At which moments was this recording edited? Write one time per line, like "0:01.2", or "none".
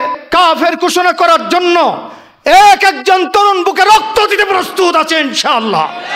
none